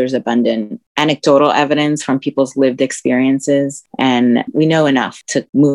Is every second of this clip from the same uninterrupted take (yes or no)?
no